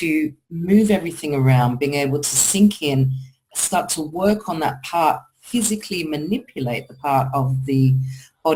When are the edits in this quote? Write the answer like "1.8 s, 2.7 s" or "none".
none